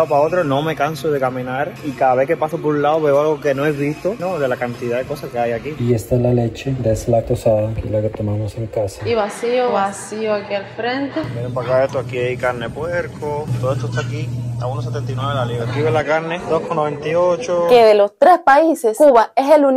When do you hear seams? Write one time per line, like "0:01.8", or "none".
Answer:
0:01.9
0:04.2
0:05.7
0:09.0
0:11.2
0:17.7